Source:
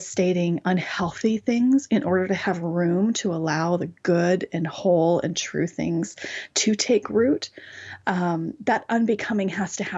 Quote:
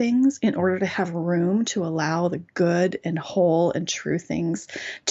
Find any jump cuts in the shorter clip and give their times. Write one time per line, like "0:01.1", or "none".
none